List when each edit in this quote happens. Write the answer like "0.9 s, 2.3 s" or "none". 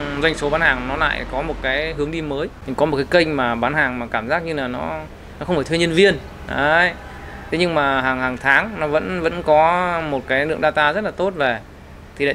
2.6 s